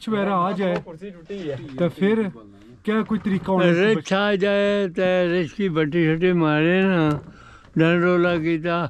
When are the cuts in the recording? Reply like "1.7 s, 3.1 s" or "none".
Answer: none